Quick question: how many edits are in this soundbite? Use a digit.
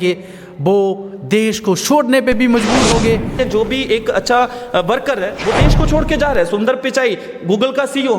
1